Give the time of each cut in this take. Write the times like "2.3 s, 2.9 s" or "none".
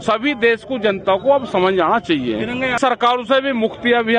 2.8 s